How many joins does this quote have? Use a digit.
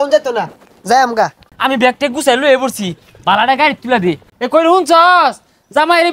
2